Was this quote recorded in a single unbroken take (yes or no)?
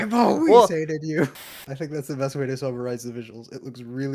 no